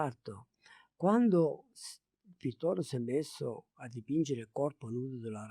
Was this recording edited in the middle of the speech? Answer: no; 0 cuts

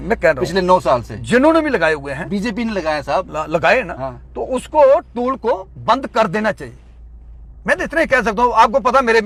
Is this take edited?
no; 0 cuts

